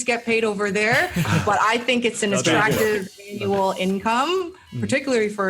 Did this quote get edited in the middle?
no; 0 cuts

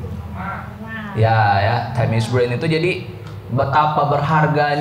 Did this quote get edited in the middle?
no; 0 cuts

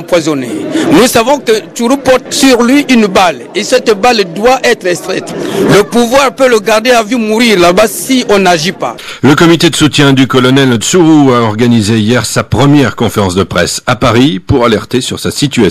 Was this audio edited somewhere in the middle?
yes; 1 cut; at 8.9 s

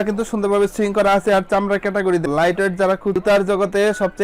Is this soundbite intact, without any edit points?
no; 1 cut; at 2.3 s

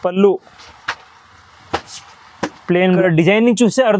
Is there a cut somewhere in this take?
yes; 1 cut; at 3.0 s

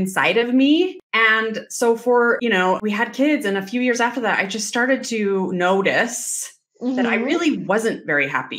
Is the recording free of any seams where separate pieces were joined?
no; 2 cuts; at 1.0 s, 2.5 s

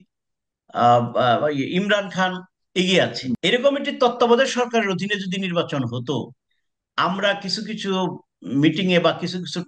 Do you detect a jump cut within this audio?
yes; 1 cut; at 3.4 s

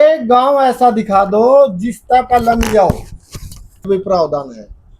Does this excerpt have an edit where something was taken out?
yes; 1 cut; at 3.9 s

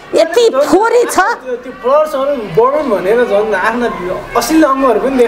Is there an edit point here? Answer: no; 0 cuts

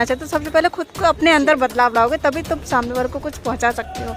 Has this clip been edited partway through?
no; 0 cuts

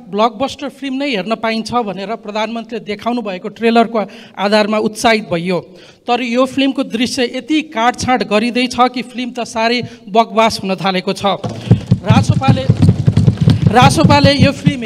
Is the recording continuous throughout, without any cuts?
yes; 0 cuts

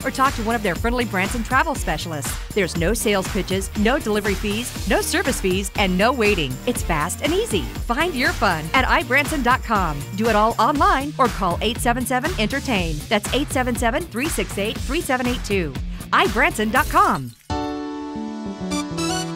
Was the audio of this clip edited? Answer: yes; 1 cut; at 17.3 s

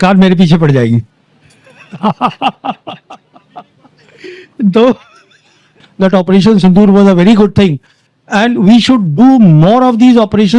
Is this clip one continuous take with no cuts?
no; 1 cut; at 5.8 s

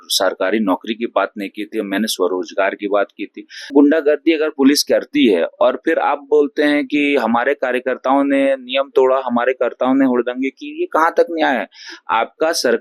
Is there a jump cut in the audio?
yes; 1 cut; at 3.7 s

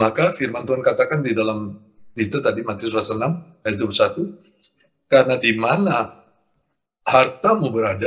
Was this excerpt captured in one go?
yes; 0 cuts

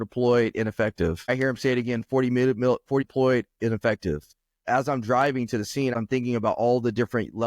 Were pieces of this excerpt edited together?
yes; 3 cuts; at 1.3 s, 4.6 s, 5.9 s

